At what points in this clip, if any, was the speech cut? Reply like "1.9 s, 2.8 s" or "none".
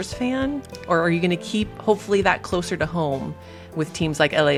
none